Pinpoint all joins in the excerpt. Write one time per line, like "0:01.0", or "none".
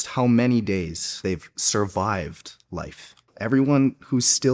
0:01.2
0:03.3